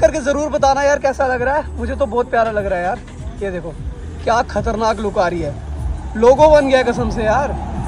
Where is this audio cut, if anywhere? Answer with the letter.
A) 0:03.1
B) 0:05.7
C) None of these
C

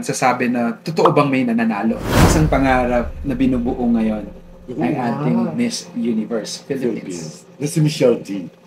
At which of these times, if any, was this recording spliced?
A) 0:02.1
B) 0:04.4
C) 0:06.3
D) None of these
A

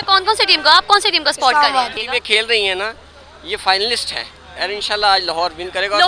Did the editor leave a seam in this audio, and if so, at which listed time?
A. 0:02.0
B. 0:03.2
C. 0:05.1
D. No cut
A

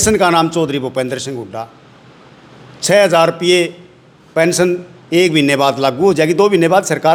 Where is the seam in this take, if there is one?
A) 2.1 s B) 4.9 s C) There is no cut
C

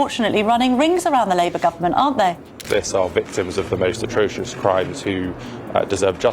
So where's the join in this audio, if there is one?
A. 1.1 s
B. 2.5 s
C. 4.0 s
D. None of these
B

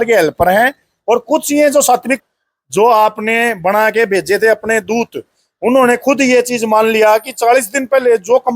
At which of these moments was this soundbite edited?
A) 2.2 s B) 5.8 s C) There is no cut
A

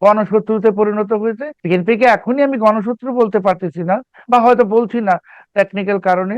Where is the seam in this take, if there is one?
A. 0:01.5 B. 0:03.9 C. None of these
A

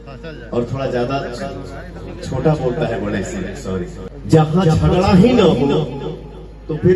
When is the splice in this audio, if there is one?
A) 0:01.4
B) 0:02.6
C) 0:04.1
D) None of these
C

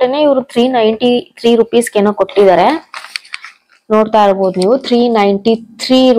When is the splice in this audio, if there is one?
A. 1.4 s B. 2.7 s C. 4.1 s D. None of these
D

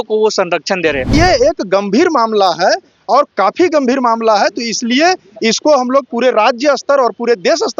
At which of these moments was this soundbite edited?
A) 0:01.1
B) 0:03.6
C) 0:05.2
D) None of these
A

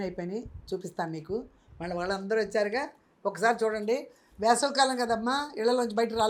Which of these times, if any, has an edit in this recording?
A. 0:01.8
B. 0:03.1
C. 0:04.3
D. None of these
D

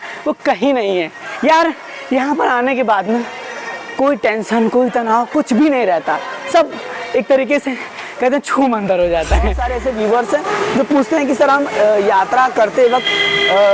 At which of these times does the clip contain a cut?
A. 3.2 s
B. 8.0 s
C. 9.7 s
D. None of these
C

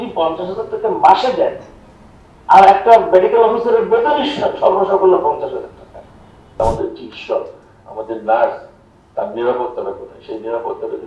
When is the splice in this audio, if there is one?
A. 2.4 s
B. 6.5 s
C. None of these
B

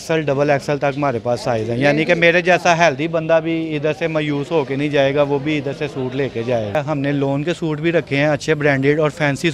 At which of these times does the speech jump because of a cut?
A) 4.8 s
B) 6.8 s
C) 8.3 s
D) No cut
B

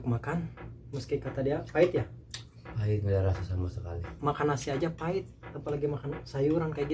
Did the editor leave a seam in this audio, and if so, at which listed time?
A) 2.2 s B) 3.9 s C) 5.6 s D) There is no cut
D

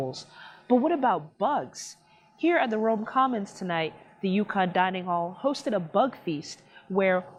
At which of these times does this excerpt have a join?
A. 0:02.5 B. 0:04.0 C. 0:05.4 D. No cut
D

